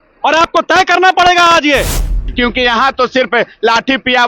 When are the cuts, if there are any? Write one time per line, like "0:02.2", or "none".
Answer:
0:02.3